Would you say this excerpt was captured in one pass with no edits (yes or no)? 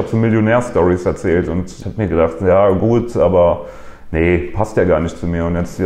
no